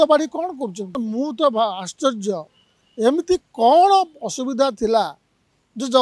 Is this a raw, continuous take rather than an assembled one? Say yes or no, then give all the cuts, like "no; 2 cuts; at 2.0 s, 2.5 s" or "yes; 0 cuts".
no; 1 cut; at 0.9 s